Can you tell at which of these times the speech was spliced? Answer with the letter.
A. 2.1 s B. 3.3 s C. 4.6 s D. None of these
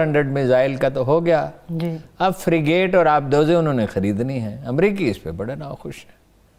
D